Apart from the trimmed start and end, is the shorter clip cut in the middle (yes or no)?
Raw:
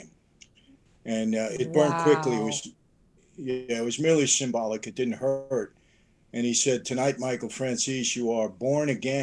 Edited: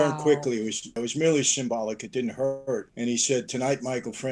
yes